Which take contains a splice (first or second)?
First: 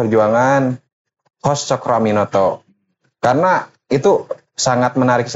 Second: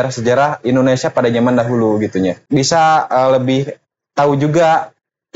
second